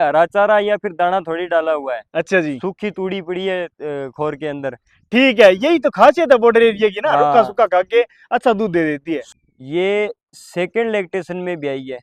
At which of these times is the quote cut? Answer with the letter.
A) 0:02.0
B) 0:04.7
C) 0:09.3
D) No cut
C